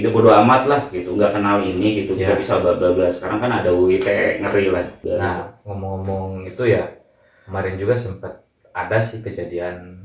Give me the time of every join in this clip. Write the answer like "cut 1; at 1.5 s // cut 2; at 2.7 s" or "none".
cut 1; at 5.0 s